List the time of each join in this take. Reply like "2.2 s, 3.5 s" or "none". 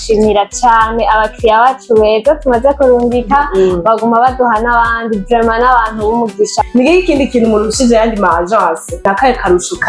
6.7 s, 9.0 s